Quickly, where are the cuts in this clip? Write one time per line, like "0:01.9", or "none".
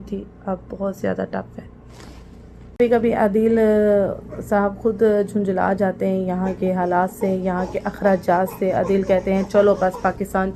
none